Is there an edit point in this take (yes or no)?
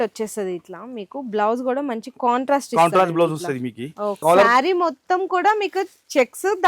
yes